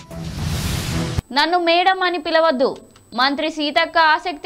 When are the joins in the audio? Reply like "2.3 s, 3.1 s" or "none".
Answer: 1.1 s